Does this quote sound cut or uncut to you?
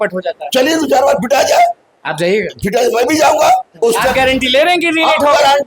cut